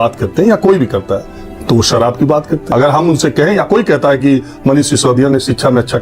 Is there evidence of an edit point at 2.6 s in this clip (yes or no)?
yes